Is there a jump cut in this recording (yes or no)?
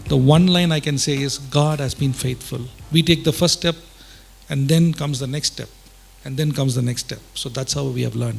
no